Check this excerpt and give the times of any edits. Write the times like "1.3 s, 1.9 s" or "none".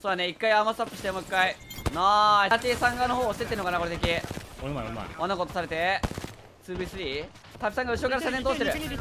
2.5 s

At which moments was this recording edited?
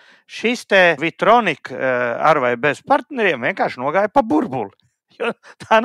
1.1 s

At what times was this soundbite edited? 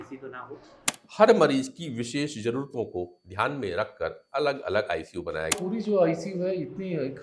0.9 s, 5.5 s

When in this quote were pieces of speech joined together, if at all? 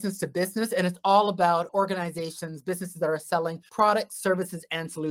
1.7 s, 3.6 s

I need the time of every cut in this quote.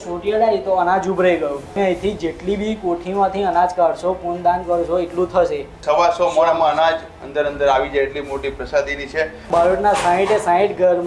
1.7 s, 5.8 s, 9.5 s

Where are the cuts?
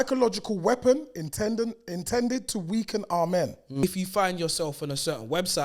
3.8 s

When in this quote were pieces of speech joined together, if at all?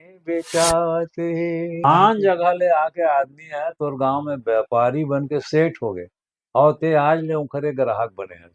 1.8 s

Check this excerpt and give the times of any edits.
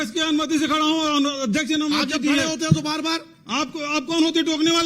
none

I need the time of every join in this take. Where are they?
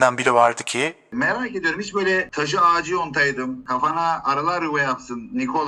1.1 s, 2.3 s, 3.6 s

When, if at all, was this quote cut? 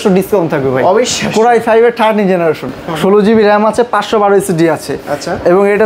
none

